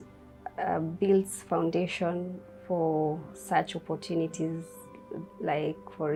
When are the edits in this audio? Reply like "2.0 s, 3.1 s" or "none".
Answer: none

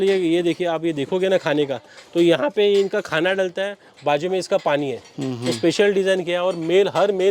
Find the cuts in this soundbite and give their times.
none

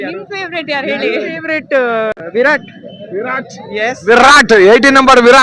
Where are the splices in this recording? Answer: 2.1 s

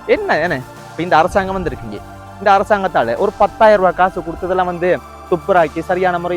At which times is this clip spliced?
none

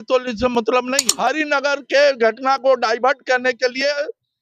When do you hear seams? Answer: 1.0 s

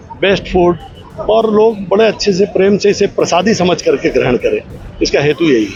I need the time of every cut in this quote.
none

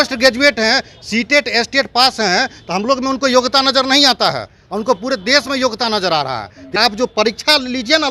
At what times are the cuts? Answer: 6.7 s

